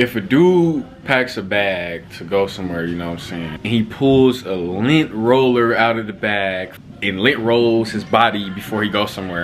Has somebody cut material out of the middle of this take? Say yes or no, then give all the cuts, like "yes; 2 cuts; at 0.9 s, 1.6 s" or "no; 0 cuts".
yes; 2 cuts; at 3.5 s, 6.7 s